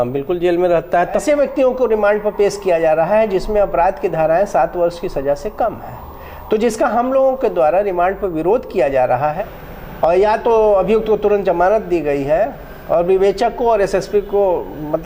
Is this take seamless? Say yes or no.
no